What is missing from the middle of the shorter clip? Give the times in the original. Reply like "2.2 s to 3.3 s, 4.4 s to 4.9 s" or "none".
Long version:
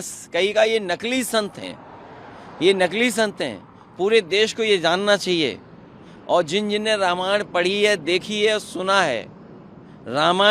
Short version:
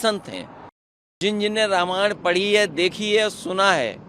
2.5 s to 6.5 s